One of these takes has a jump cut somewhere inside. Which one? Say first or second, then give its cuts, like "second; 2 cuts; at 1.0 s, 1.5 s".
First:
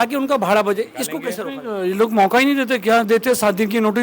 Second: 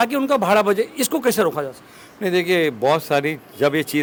first; 1 cut; at 1.3 s